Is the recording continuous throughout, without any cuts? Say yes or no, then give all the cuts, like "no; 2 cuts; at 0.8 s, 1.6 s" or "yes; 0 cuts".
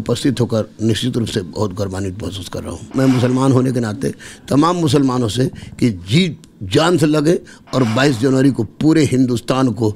no; 1 cut; at 2.9 s